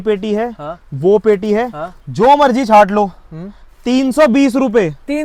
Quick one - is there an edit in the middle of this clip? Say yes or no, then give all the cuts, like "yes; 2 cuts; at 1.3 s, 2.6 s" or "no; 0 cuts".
no; 0 cuts